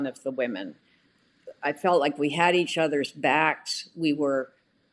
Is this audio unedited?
yes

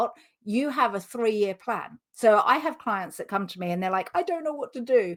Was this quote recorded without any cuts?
yes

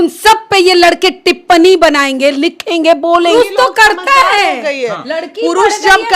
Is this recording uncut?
no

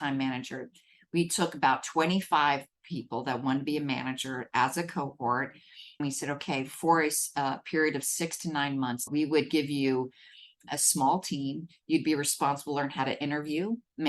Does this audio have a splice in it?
yes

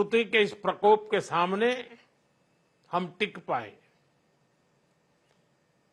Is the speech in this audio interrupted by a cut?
no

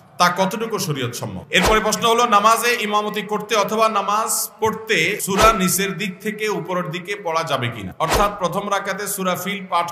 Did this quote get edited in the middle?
yes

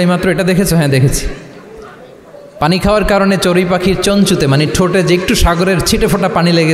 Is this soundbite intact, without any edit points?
yes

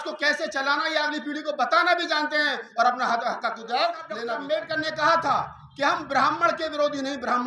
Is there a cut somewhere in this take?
yes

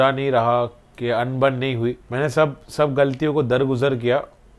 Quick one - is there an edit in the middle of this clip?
yes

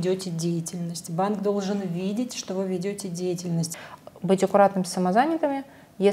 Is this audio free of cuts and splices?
no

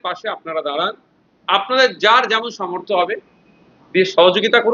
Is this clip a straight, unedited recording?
yes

